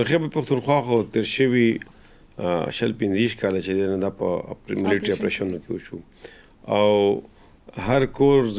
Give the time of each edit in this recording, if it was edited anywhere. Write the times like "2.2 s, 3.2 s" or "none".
none